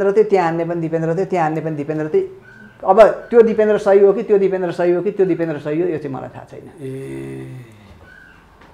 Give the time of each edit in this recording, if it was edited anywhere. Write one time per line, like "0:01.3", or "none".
none